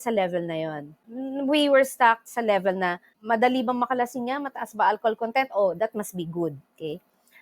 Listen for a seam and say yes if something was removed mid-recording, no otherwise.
no